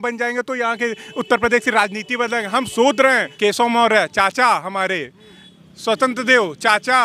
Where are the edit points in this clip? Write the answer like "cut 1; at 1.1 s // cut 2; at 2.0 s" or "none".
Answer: cut 1; at 3.3 s